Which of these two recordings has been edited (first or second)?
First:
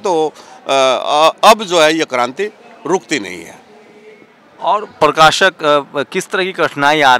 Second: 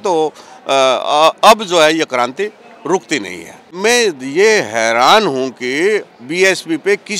second